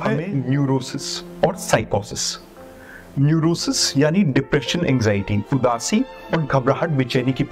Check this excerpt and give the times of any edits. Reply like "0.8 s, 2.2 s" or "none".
none